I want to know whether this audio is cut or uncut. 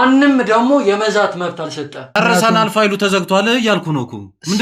cut